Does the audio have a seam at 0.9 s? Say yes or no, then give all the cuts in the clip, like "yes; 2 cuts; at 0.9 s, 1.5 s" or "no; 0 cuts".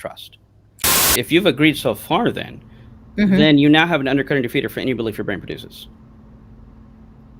yes; 1 cut; at 0.9 s